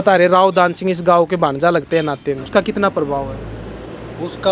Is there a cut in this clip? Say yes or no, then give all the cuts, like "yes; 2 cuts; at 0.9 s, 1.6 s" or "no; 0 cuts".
yes; 1 cut; at 2.4 s